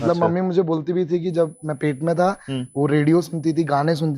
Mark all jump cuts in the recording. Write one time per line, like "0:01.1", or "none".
none